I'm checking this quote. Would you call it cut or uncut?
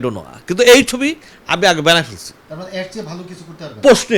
cut